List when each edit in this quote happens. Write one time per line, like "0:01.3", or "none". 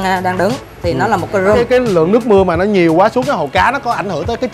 0:01.6